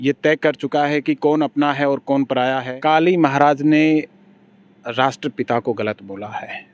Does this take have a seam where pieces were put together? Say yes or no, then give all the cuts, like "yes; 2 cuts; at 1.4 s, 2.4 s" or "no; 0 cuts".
yes; 1 cut; at 2.7 s